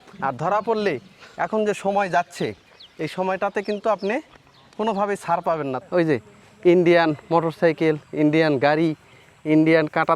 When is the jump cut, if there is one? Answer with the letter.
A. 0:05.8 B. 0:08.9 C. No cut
A